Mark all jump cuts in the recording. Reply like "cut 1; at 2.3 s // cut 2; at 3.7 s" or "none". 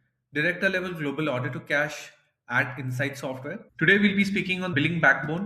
cut 1; at 3.6 s // cut 2; at 4.7 s